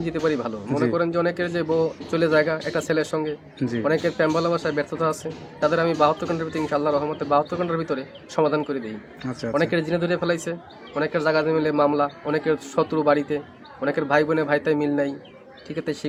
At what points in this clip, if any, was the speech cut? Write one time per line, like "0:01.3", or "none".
none